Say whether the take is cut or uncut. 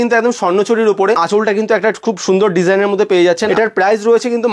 cut